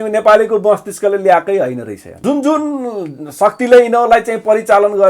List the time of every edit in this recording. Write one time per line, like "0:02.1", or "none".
0:02.0